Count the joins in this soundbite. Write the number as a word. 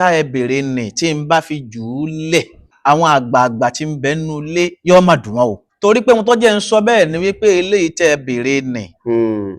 two